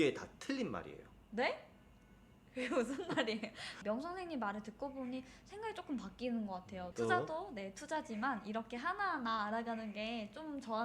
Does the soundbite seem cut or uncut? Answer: cut